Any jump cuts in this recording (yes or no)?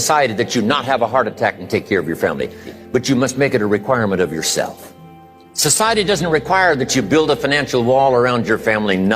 yes